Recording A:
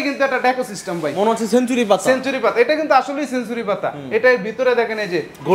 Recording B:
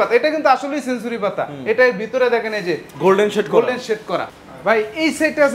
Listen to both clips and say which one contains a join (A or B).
B